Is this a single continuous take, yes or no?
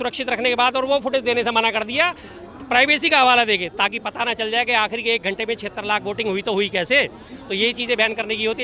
yes